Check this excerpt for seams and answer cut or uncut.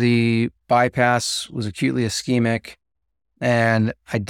uncut